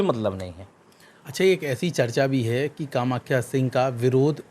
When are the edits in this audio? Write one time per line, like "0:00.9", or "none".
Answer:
none